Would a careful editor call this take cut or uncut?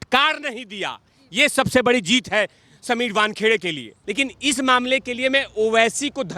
cut